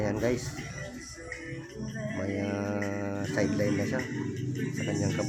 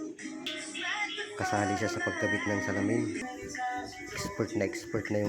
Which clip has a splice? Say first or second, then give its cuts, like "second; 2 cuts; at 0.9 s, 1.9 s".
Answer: second; 1 cut; at 3.2 s